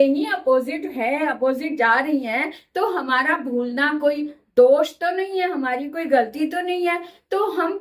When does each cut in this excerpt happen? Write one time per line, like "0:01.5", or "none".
none